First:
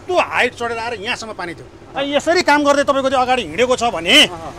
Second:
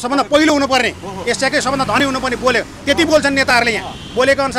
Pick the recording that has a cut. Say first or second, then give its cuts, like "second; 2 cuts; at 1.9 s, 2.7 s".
first; 1 cut; at 1.8 s